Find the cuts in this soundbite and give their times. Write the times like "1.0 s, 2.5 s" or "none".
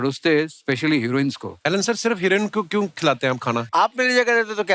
1.5 s, 3.7 s